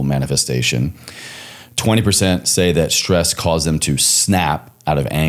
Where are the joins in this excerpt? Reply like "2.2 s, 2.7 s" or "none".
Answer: none